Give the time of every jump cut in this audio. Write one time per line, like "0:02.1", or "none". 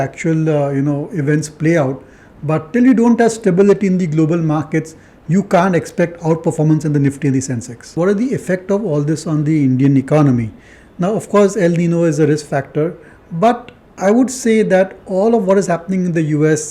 0:07.9